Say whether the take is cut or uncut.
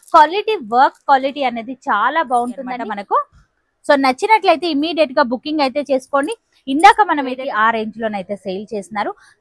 cut